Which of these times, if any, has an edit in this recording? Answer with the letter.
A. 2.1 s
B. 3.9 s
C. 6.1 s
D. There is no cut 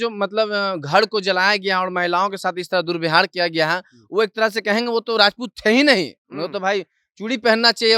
D